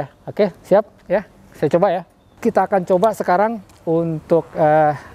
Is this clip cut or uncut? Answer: cut